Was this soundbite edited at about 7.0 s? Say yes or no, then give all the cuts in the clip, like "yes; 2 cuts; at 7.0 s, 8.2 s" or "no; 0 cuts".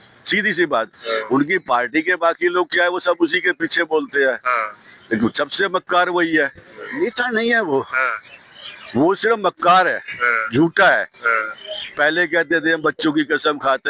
yes; 1 cut; at 7.0 s